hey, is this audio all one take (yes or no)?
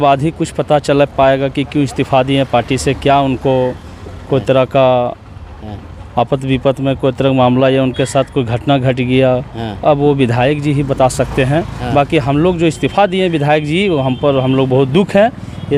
yes